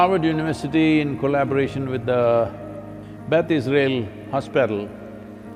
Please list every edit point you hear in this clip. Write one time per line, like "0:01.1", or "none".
none